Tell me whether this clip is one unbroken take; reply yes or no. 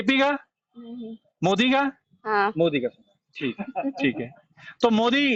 yes